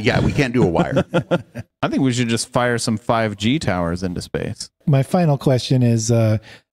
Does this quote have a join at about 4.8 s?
yes; 2 cuts; at 1.7 s, 4.8 s

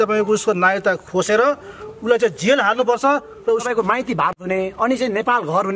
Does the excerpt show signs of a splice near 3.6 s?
yes; 1 cut; at 3.6 s

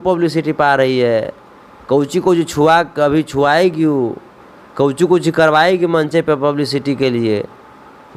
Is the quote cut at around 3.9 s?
no; 0 cuts

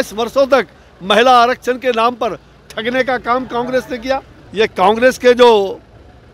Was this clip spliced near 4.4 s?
yes; 1 cut; at 4.4 s

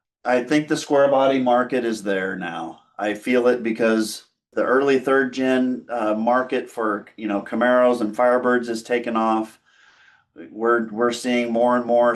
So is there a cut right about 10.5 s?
no; 1 cut; at 4.4 s

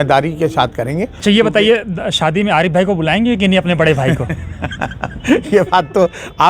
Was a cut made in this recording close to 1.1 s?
yes; 1 cut; at 1.1 s

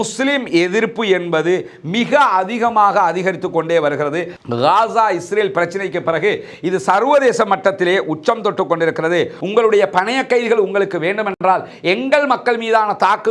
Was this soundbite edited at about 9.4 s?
yes; 1 cut; at 9.4 s

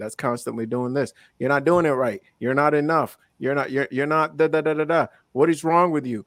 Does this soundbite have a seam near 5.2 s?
no; 0 cuts

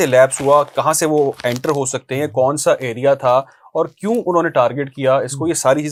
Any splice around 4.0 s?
no; 0 cuts

